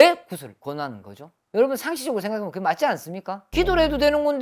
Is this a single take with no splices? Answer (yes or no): yes